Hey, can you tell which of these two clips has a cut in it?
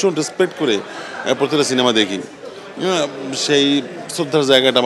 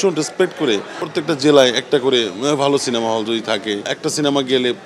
second; 2 cuts; at 1.0 s, 3.9 s

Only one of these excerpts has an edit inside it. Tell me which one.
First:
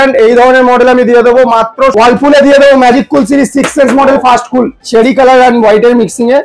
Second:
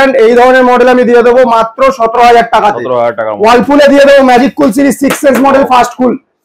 first; 2 cuts; at 1.9 s, 4.8 s

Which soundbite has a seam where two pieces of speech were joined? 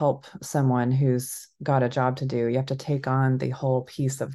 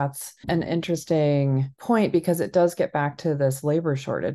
second; 1 cut; at 1.7 s

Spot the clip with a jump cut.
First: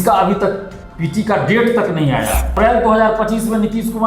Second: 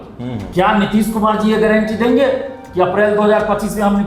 first; 1 cut; at 2.5 s

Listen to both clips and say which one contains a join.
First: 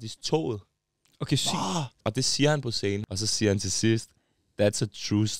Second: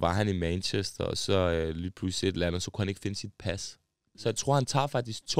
first; 2 cuts; at 2.0 s, 3.1 s

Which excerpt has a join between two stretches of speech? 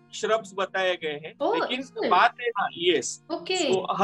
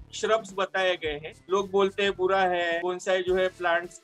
second; 1 cut; at 1.3 s

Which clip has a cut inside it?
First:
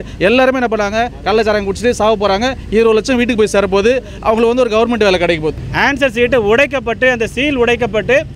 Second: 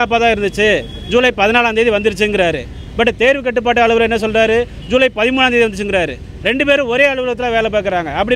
first; 1 cut; at 5.5 s

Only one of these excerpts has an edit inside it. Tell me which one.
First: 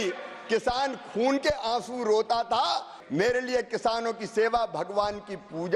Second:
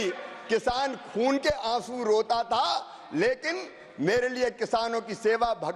first; 1 cut; at 2.9 s

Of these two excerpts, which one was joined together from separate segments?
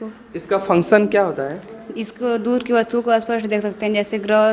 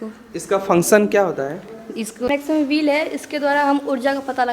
second; 1 cut; at 2.3 s

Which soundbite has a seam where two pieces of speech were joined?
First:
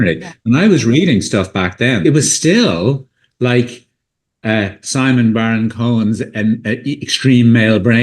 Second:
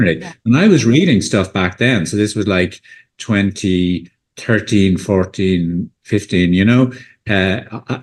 first; 1 cut; at 2.0 s

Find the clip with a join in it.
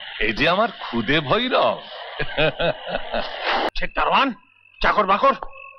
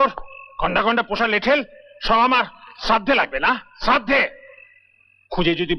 first; 1 cut; at 3.7 s

